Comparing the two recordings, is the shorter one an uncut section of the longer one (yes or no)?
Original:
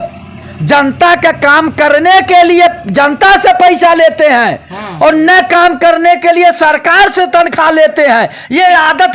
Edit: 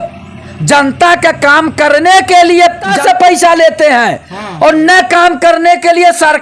no